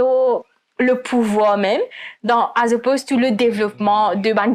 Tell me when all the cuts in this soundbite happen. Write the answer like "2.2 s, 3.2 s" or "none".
none

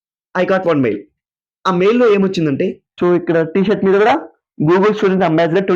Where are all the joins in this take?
2.8 s

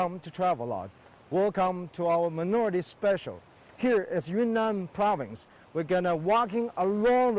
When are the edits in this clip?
5.9 s

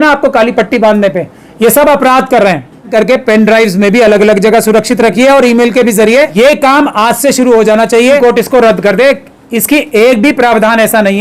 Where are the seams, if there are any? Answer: 2.9 s, 6.3 s, 8.2 s

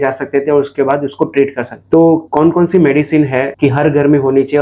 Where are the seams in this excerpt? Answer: 3.5 s

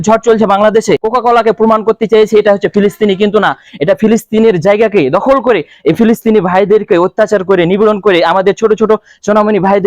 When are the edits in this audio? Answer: 1.0 s

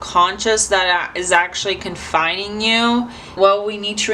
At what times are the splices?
3.2 s

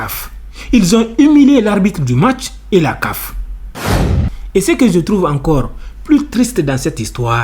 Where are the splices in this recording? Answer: 3.9 s

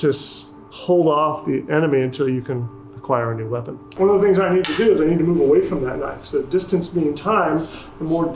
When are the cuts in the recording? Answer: 3.8 s

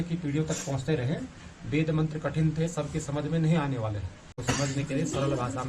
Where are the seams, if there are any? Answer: 4.3 s

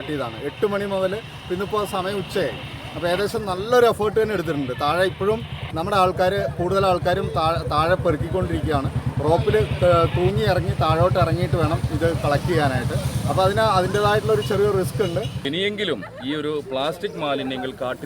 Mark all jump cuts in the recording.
15.5 s

